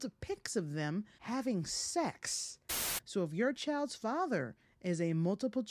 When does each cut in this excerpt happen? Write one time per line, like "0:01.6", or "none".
0:01.2
0:02.8